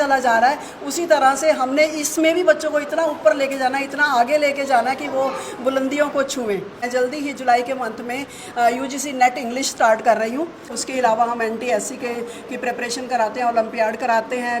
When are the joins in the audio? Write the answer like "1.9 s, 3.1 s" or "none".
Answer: 6.9 s, 10.7 s